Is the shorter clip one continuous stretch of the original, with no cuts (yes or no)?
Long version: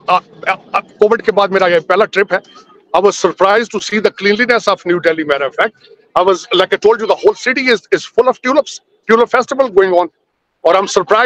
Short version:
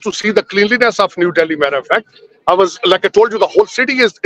yes